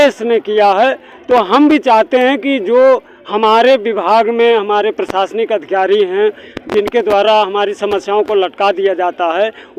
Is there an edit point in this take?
no; 0 cuts

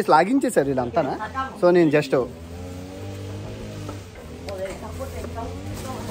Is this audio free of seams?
yes; 0 cuts

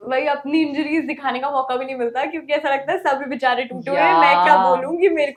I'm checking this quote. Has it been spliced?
no; 0 cuts

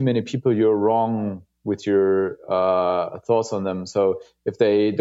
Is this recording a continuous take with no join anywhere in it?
yes; 0 cuts

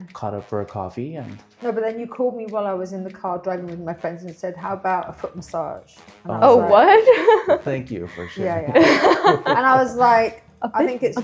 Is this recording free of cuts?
yes; 0 cuts

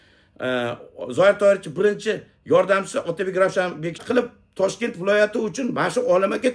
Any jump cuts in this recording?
yes; 1 cut; at 4.0 s

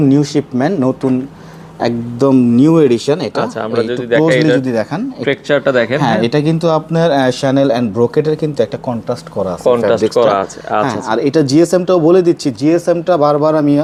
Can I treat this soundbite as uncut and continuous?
yes; 0 cuts

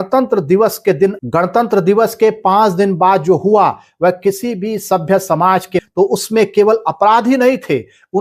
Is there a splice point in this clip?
yes; 2 cuts; at 1.2 s, 5.8 s

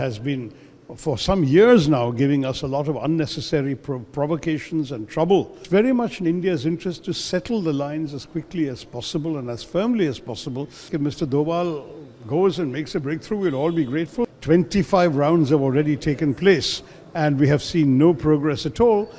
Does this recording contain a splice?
yes; 3 cuts; at 5.6 s, 10.9 s, 14.3 s

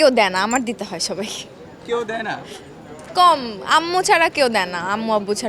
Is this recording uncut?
yes; 0 cuts

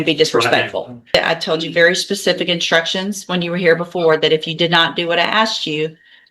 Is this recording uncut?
no; 1 cut; at 1.1 s

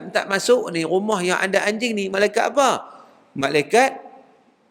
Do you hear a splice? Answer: no; 0 cuts

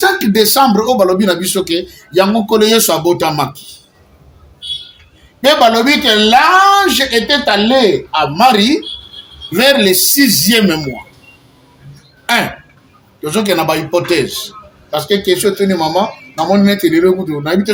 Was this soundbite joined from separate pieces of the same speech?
no; 0 cuts

